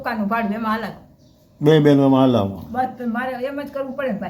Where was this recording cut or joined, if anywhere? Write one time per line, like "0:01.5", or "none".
none